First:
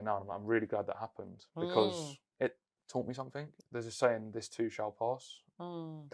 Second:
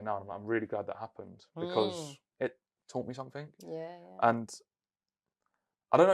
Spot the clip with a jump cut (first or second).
first